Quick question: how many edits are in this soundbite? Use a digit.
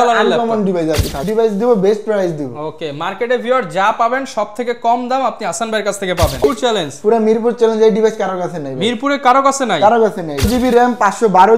3